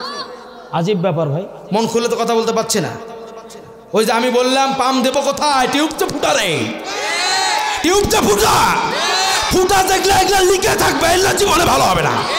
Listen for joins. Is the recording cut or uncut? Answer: cut